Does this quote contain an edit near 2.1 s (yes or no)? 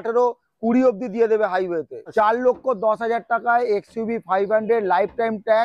yes